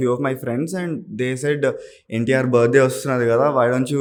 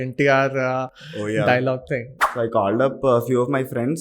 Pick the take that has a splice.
second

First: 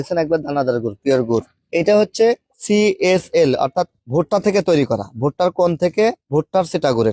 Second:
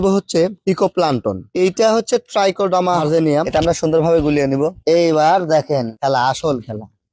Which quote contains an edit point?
second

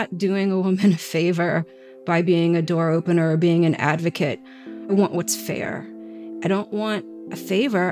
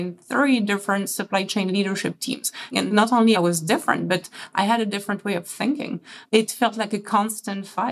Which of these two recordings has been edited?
second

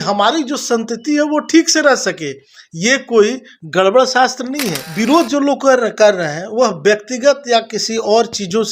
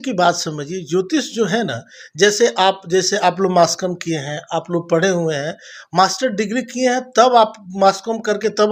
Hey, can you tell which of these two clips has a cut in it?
first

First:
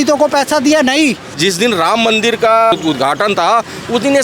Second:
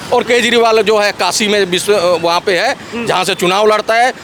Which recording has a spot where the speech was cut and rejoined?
first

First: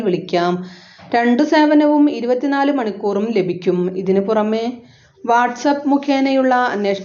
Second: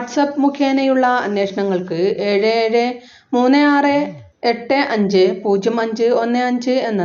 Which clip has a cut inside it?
second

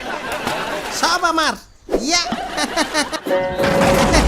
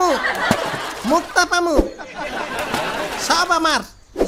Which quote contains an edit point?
first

